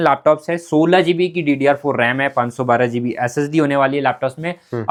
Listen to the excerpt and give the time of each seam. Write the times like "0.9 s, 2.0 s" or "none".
none